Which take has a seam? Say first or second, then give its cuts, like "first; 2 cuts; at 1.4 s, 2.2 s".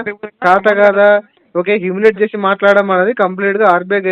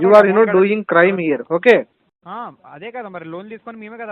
second; 1 cut; at 2.1 s